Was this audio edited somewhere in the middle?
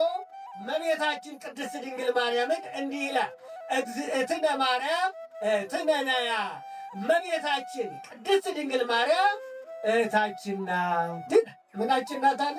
no; 0 cuts

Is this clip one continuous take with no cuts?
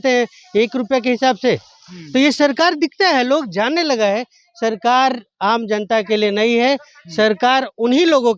yes; 0 cuts

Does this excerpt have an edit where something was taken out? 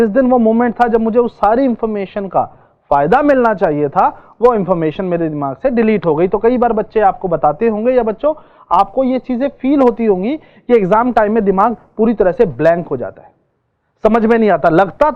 no; 0 cuts

